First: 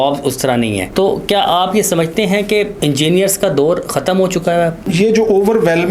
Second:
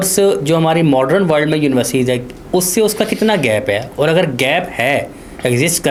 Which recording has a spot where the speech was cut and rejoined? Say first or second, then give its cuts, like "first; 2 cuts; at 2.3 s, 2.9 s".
first; 3 cuts; at 0.9 s, 2.7 s, 4.8 s